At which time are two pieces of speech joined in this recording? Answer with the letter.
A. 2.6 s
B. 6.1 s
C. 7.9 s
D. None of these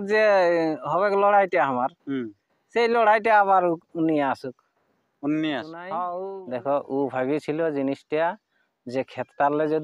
B